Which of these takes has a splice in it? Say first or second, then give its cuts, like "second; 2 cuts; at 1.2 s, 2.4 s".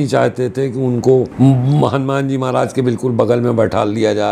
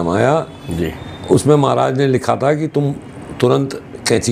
first; 1 cut; at 1.3 s